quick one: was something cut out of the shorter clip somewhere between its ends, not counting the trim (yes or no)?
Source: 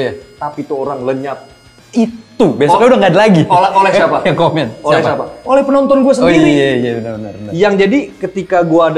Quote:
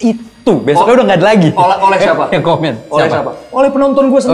no